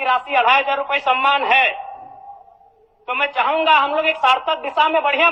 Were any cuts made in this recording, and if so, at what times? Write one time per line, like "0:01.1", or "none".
none

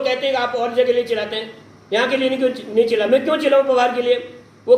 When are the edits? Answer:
none

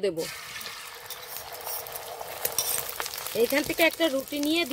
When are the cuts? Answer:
0:02.8

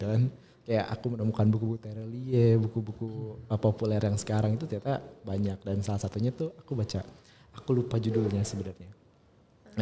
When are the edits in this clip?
none

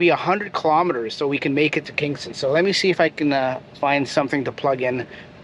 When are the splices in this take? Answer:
none

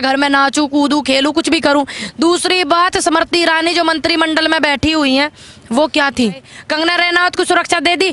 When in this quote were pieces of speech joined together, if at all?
0:06.5

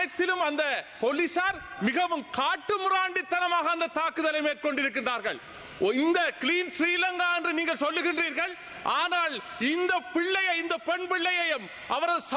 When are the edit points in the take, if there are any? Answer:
none

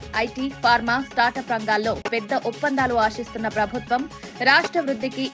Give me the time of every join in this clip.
none

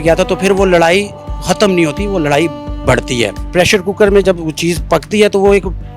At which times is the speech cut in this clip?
0:03.4

